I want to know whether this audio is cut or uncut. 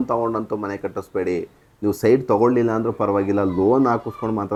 uncut